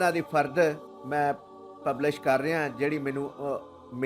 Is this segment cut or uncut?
cut